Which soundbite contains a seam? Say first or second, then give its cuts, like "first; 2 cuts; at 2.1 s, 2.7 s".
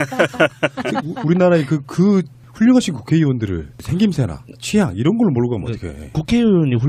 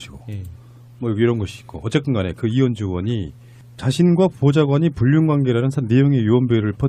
second; 1 cut; at 4.2 s